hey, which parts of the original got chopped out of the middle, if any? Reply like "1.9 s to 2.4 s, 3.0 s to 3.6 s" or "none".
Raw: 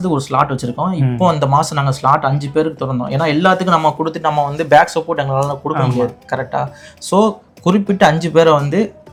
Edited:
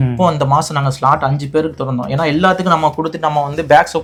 none